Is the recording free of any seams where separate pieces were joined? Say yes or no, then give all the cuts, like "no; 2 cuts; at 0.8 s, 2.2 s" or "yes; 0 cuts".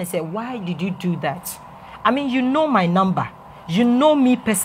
yes; 0 cuts